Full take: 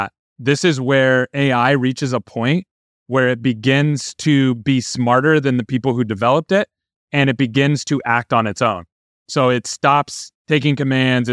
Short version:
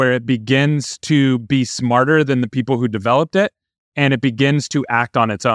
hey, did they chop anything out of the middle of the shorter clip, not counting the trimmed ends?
no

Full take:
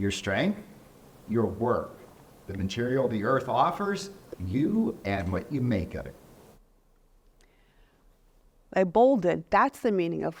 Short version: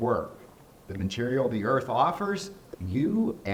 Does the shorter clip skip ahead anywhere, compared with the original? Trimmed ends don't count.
no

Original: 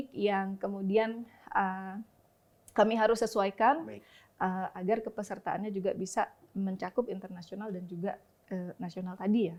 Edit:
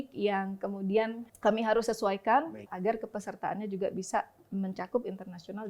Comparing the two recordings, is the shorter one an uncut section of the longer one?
no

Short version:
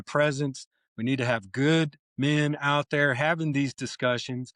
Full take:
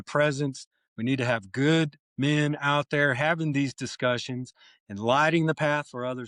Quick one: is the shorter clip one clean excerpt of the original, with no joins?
yes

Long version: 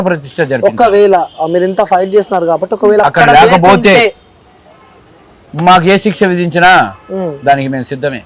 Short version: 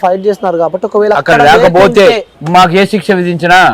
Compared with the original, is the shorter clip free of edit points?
no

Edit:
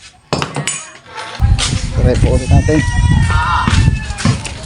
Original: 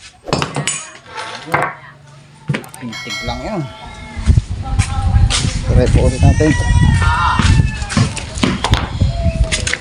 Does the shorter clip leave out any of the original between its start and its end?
yes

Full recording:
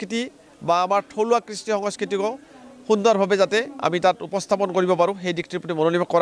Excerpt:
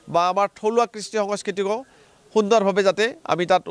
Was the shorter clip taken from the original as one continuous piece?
yes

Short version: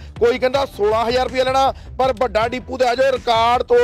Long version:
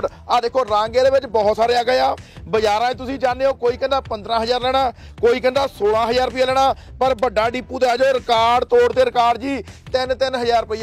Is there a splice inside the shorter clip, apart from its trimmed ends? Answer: no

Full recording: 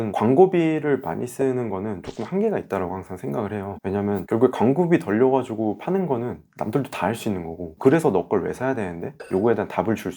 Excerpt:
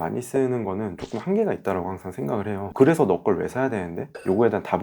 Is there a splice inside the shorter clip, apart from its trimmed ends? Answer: yes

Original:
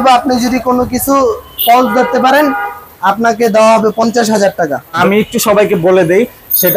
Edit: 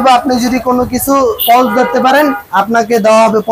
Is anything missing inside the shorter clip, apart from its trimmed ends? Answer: yes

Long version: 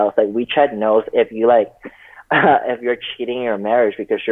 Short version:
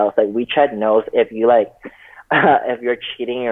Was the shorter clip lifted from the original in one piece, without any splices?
yes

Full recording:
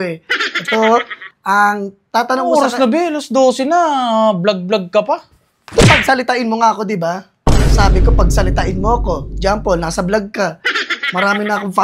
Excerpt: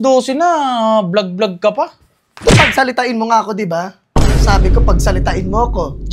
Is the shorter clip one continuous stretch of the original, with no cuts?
yes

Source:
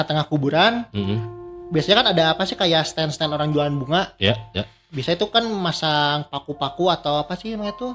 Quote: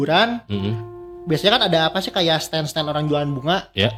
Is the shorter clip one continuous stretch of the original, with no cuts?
yes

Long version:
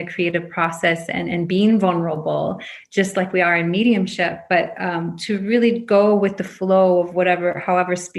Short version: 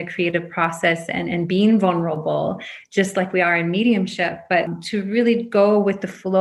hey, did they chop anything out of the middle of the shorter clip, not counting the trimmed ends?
yes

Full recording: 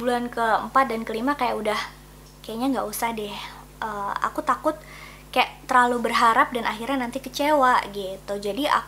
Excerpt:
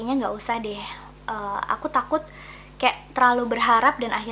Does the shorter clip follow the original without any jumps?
yes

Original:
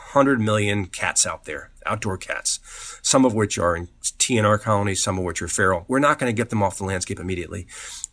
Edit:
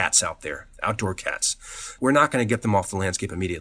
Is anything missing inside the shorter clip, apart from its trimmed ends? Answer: yes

